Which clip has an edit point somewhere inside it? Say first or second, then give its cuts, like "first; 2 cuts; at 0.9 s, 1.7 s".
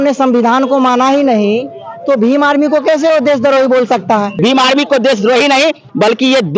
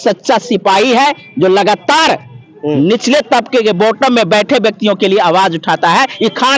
first; 1 cut; at 4.3 s